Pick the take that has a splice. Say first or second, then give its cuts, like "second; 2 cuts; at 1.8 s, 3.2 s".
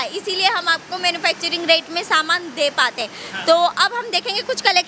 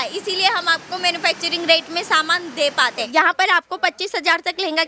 second; 1 cut; at 3.1 s